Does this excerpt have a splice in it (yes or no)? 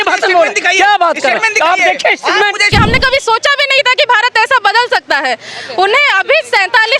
yes